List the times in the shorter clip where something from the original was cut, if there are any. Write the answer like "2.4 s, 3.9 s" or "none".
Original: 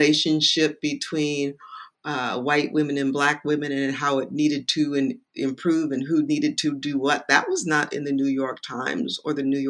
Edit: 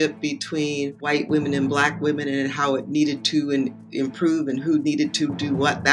1.0 s